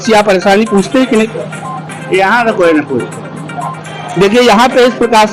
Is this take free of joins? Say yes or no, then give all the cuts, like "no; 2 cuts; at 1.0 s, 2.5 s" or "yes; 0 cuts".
yes; 0 cuts